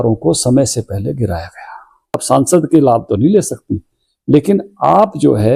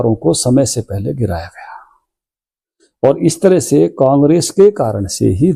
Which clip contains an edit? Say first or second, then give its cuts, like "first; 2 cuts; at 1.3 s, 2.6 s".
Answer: first; 1 cut; at 2.2 s